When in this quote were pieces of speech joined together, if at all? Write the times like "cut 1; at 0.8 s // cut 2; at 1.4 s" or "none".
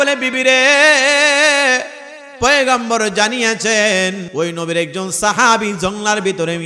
cut 1; at 4.2 s